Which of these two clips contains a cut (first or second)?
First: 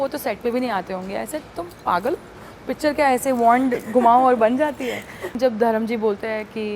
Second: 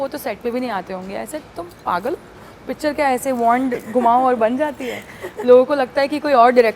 first